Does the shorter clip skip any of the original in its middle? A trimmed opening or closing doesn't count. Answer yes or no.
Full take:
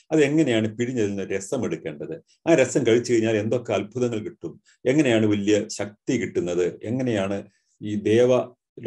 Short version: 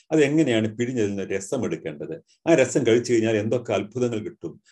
no